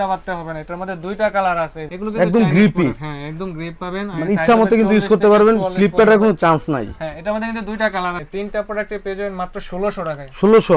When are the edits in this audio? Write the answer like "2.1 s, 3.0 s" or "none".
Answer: 2.0 s, 8.2 s